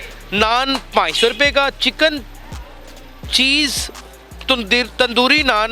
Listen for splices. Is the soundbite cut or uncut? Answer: uncut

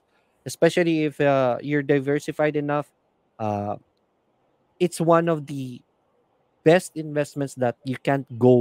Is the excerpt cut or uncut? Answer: uncut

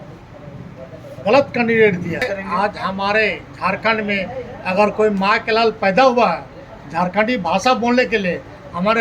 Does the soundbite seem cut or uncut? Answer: cut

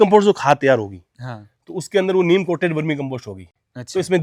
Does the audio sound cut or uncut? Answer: uncut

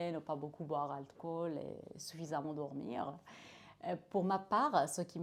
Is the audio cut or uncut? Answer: uncut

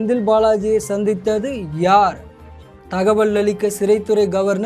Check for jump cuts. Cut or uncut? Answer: uncut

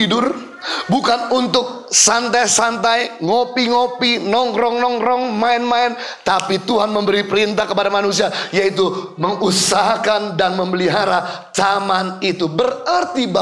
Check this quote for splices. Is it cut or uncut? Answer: uncut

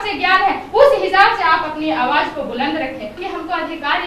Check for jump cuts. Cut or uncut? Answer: cut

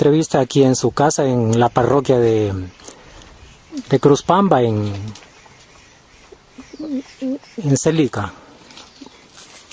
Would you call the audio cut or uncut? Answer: uncut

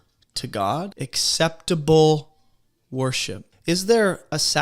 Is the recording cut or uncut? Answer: cut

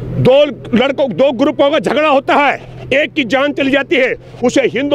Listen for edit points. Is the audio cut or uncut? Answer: uncut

